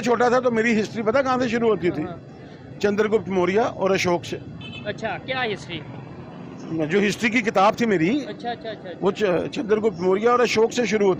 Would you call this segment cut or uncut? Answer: uncut